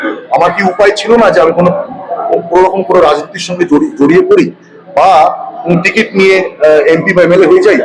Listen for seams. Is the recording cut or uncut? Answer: uncut